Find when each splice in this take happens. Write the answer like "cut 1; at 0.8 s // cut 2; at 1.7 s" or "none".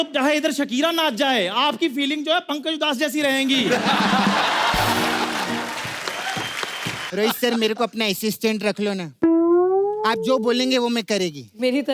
cut 1; at 7.1 s